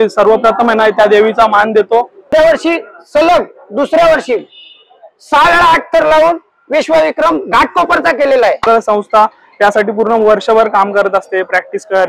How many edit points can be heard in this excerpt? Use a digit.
2